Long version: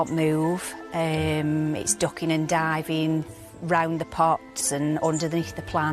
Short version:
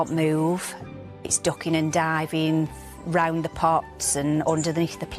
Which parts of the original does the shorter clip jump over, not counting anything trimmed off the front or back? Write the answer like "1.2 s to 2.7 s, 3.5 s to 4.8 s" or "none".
1.1 s to 1.7 s